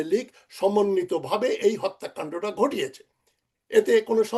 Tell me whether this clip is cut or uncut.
uncut